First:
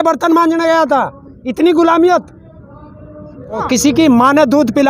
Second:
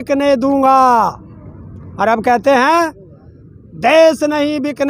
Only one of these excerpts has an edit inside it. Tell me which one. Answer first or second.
first